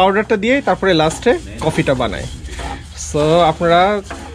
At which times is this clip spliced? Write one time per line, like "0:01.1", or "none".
none